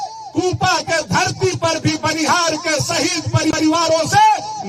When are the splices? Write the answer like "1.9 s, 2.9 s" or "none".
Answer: none